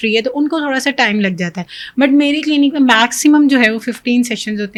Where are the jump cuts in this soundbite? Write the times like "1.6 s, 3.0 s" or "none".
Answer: none